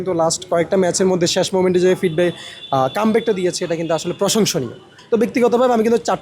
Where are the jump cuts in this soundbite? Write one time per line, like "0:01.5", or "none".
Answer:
0:04.9

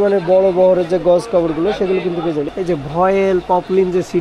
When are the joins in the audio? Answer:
0:02.5

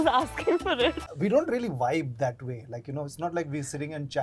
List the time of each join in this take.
0:01.1

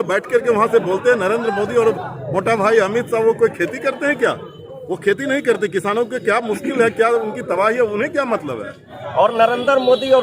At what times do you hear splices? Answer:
0:08.9

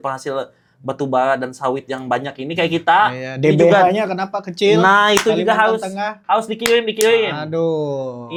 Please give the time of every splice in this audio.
none

